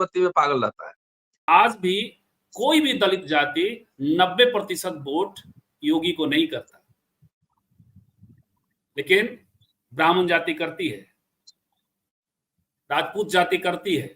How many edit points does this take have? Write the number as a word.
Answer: one